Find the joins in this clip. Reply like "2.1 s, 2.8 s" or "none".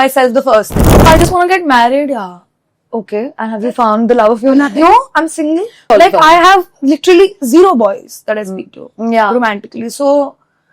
1.1 s, 5.9 s